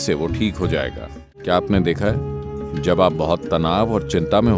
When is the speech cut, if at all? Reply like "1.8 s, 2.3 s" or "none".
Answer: 1.4 s